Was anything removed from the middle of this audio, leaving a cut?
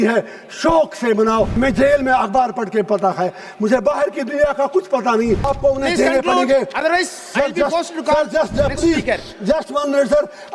yes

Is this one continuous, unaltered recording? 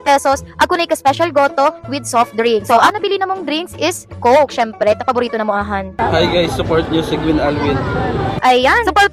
yes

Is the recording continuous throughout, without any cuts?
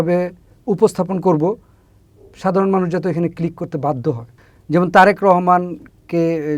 yes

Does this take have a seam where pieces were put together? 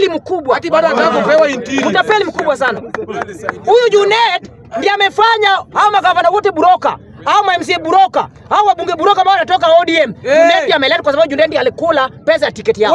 no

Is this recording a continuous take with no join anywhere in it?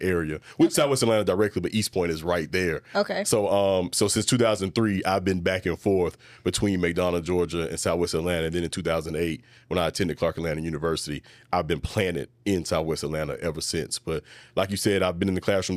yes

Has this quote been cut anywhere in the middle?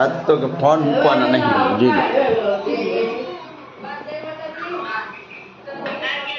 no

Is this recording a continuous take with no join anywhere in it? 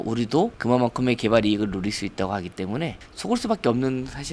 yes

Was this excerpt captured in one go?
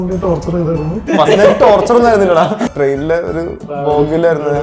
no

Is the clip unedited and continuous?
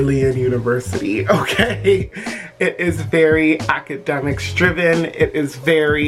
yes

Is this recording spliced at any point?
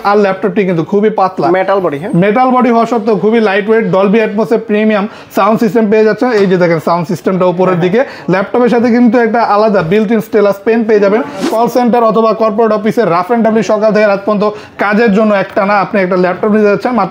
yes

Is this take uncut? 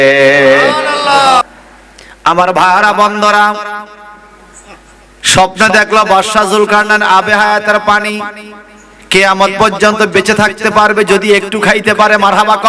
no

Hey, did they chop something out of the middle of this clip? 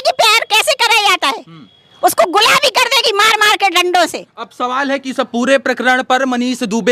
no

